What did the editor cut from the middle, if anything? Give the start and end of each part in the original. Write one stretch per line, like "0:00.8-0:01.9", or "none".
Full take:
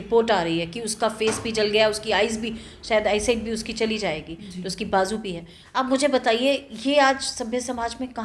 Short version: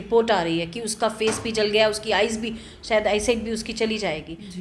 none